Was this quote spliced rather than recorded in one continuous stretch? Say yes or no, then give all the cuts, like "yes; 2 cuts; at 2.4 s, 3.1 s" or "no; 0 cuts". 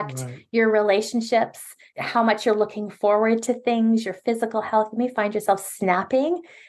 yes; 1 cut; at 1.8 s